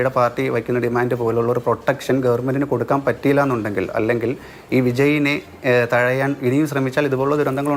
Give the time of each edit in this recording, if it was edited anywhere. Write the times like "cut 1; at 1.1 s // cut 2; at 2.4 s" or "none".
none